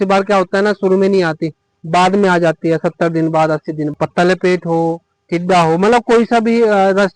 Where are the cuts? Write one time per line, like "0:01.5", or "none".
0:03.9